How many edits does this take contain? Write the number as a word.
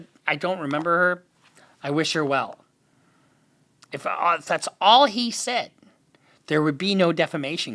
zero